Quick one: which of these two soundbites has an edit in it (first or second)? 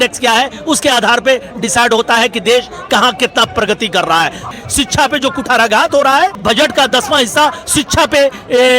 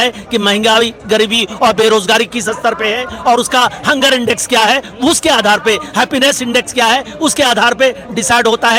first